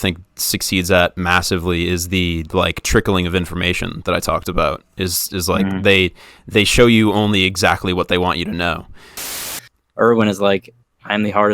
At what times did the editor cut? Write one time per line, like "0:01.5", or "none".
0:09.4